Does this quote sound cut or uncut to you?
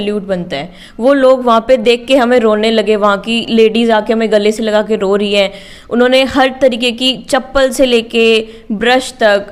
uncut